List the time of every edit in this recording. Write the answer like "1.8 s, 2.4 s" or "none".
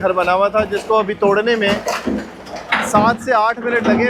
none